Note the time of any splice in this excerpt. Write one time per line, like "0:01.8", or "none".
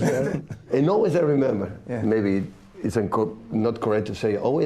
none